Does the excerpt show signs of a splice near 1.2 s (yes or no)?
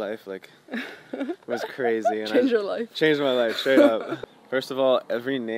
no